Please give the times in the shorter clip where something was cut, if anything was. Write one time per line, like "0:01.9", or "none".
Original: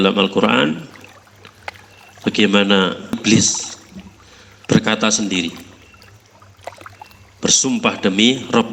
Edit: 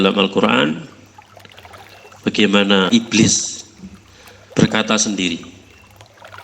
0:03.0

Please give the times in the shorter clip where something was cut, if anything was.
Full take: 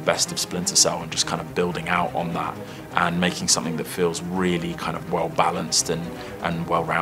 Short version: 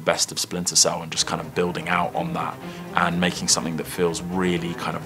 none

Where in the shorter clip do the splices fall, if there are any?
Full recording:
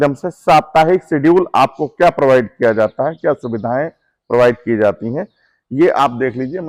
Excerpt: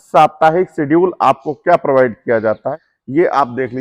0:02.8

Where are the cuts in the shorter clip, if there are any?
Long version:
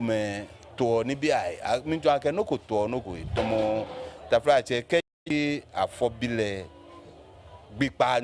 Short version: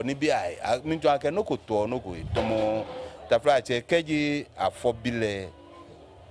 0:04.1

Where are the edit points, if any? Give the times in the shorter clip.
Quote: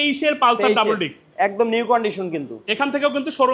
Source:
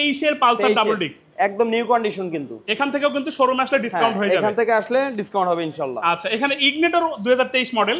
none

